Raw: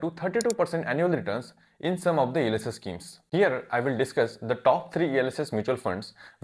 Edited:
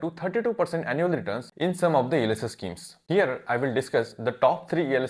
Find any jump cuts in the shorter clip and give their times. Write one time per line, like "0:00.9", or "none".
0:01.4

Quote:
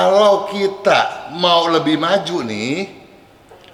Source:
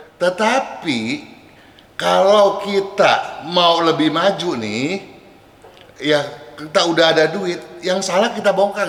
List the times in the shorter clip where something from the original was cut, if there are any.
none

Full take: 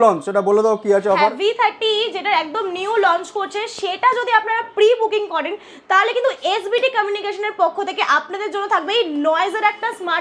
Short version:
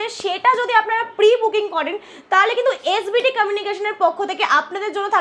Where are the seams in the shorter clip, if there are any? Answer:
none

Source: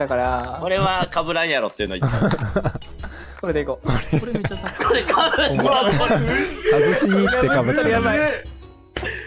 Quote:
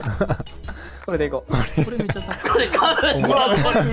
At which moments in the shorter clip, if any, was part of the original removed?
none

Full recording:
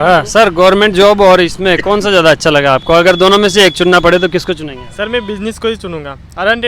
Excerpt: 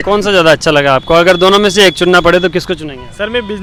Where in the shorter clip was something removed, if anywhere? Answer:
none

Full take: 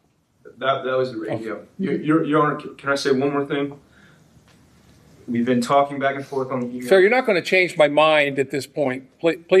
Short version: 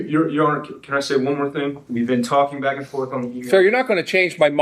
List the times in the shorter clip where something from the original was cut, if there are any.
0:01.8

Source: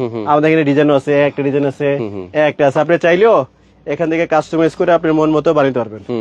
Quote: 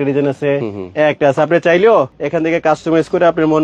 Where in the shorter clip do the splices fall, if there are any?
0:02.2

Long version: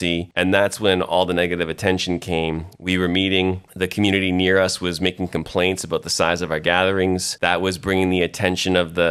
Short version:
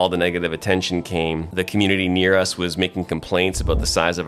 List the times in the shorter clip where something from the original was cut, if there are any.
0:01.5

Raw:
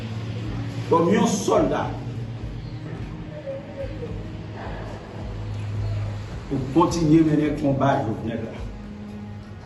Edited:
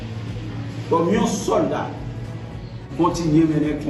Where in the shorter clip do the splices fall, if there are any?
0:02.9

